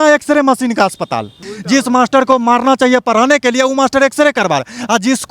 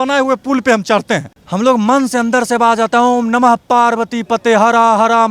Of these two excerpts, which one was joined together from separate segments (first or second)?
first